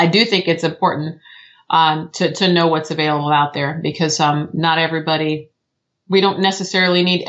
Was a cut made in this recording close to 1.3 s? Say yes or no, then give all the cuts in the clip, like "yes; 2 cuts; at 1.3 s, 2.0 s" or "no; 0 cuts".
no; 0 cuts